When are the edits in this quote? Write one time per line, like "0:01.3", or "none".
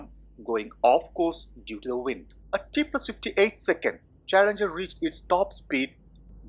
0:02.3